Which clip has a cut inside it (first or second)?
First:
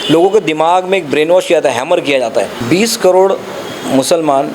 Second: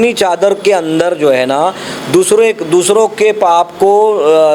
first